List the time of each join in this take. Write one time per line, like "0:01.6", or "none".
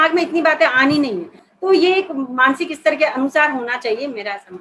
0:01.4